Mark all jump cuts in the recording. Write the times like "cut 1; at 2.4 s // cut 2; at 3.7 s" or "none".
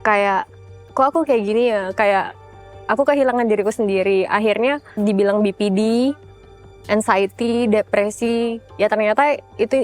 cut 1; at 5.0 s